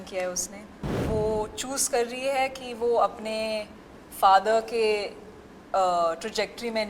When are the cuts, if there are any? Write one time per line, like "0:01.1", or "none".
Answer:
0:01.0